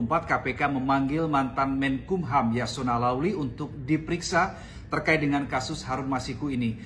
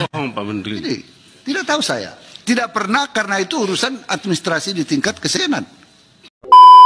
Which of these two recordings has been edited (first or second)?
second